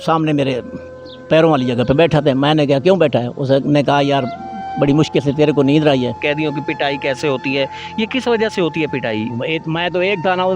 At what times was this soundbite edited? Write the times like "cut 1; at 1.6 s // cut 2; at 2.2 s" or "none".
cut 1; at 6.2 s // cut 2; at 9.3 s